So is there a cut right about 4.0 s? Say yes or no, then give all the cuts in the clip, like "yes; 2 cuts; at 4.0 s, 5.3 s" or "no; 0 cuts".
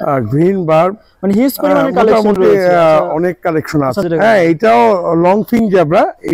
yes; 1 cut; at 4.0 s